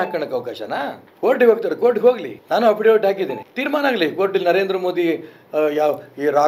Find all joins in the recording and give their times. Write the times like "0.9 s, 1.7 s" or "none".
1.0 s, 2.3 s, 3.5 s